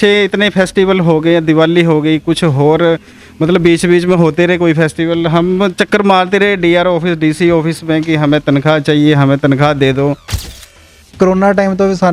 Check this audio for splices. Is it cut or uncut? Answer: cut